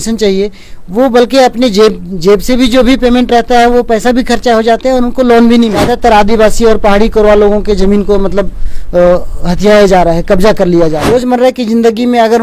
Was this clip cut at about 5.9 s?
yes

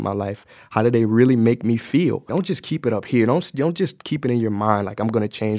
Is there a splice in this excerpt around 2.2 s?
yes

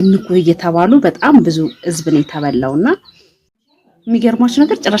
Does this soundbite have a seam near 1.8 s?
no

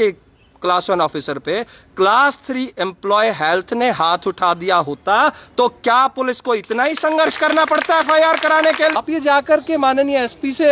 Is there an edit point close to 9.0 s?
yes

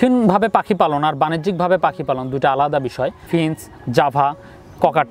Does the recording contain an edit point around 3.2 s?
yes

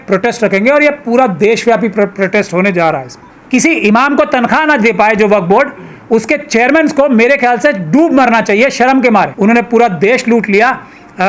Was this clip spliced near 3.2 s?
yes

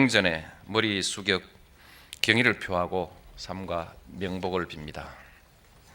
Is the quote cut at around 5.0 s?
no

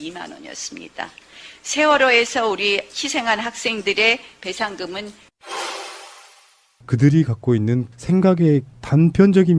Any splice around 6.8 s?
yes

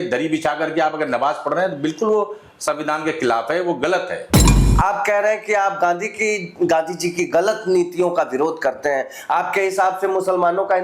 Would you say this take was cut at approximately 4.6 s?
yes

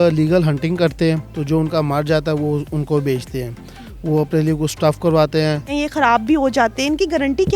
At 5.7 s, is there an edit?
yes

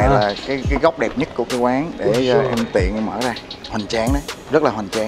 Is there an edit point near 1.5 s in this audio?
yes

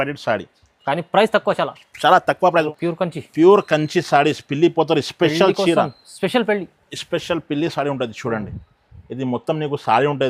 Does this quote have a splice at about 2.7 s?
yes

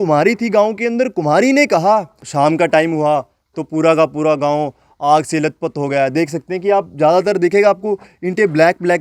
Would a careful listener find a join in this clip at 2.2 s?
yes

